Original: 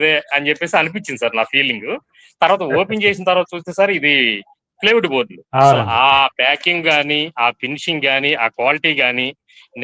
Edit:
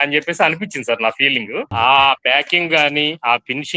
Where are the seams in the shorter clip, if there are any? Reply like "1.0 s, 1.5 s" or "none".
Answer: 1.7 s